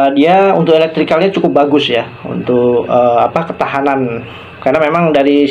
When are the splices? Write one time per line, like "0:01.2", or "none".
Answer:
none